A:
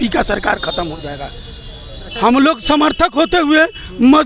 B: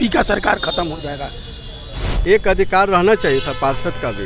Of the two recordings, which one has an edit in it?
B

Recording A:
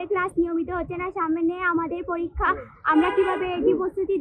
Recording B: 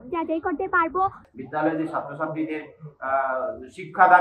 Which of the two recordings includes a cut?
B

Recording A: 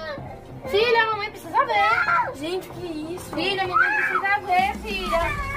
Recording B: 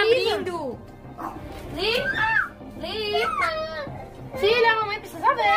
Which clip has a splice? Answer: B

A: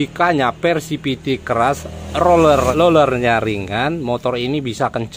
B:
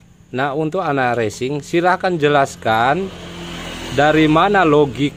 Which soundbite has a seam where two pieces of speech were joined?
A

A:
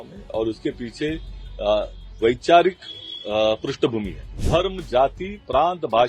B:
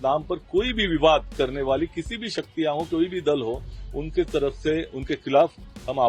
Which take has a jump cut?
A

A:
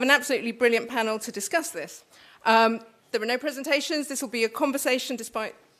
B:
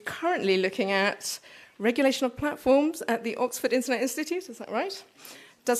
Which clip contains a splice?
B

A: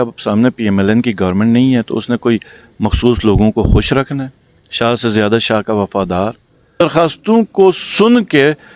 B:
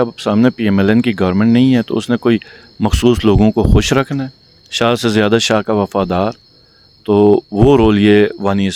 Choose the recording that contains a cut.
A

